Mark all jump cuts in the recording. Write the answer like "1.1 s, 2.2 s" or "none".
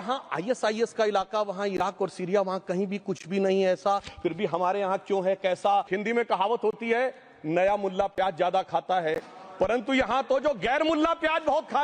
5.9 s